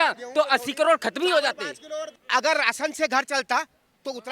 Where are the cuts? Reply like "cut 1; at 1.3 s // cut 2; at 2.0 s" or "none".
cut 1; at 2.1 s